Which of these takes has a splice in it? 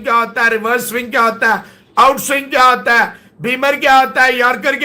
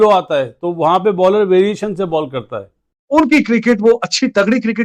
second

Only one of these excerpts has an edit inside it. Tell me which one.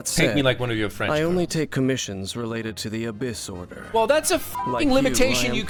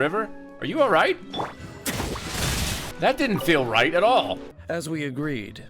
second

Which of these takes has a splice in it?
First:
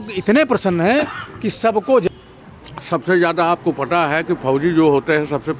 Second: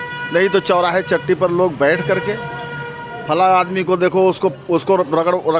first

